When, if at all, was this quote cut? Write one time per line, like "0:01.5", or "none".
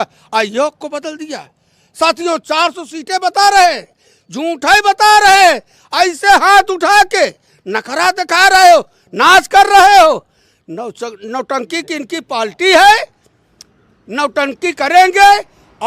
none